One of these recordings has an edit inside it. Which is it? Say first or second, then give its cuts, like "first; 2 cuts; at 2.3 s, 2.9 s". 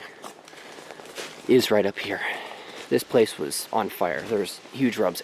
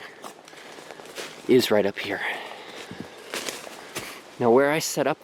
first; 1 cut; at 2.7 s